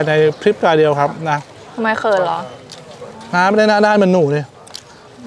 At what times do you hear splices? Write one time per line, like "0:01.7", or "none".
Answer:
none